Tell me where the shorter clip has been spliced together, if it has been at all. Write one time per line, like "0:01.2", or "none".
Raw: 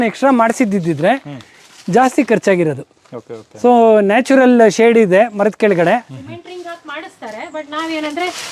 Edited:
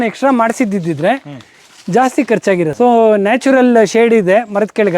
0:02.7